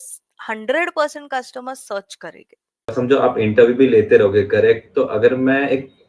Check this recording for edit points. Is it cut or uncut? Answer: cut